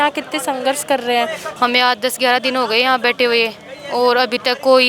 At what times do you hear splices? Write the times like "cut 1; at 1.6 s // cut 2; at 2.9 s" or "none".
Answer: cut 1; at 1.5 s